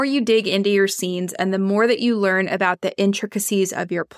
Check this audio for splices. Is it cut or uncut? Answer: uncut